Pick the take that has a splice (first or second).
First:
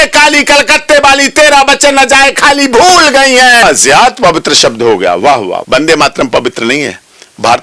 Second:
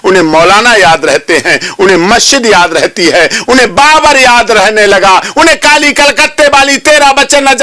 first